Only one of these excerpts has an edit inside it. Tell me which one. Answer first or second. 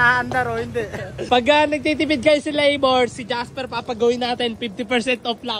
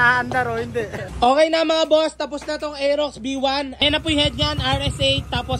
second